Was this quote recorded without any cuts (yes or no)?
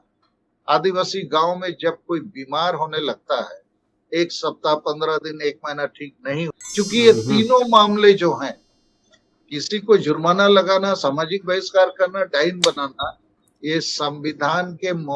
no